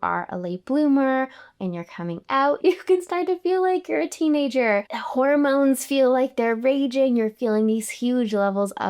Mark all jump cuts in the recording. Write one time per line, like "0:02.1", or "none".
0:02.6